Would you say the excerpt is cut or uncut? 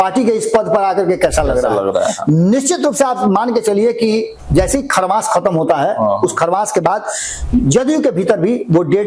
uncut